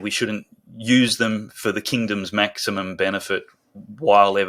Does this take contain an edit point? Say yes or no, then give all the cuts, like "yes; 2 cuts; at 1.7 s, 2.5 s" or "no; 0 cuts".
no; 0 cuts